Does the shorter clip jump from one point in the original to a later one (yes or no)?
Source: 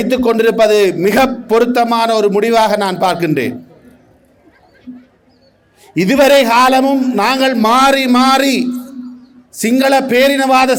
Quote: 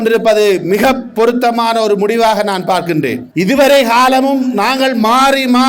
yes